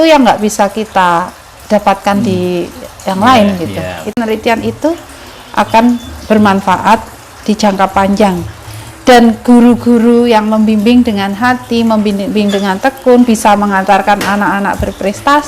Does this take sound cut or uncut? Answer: cut